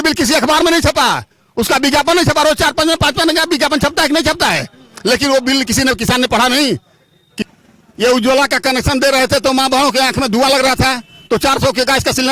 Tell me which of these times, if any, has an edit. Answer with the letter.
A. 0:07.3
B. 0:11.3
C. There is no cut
A